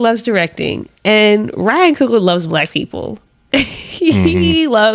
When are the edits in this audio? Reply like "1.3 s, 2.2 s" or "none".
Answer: none